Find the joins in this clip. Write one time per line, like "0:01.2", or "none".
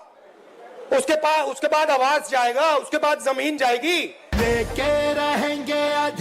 0:04.2